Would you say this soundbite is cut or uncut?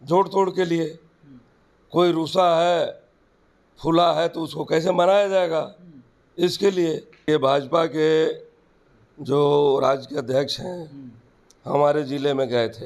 cut